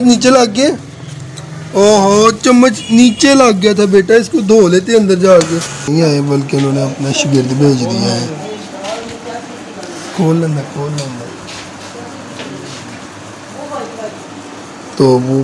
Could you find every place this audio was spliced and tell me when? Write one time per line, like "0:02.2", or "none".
0:05.9